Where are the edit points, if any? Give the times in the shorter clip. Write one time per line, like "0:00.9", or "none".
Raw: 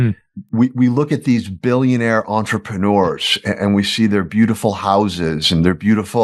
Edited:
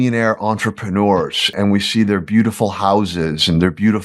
0:01.4